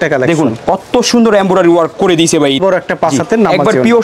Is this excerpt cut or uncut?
cut